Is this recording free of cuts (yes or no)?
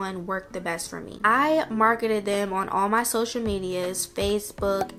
yes